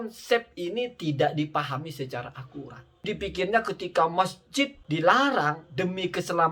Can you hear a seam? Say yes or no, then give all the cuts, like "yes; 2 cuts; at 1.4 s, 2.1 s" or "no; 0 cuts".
yes; 2 cuts; at 3.0 s, 4.8 s